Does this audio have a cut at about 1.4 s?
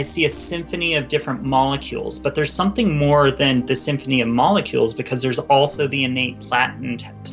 no; 0 cuts

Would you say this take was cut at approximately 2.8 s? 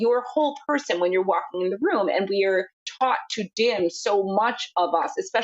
yes; 1 cut; at 2.8 s

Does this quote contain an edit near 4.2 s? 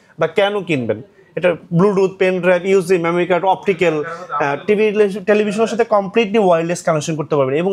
no; 0 cuts

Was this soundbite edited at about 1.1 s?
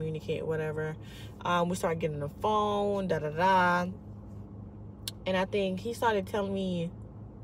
no; 0 cuts

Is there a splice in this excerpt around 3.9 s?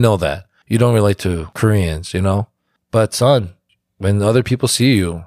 no; 1 cut; at 1.5 s

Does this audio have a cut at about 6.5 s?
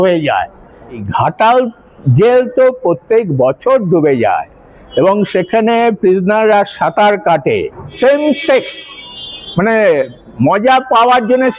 no; 2 cuts; at 1.1 s, 7.9 s

